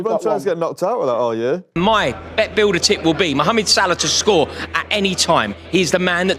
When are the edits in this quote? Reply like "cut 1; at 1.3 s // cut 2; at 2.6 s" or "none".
cut 1; at 2.2 s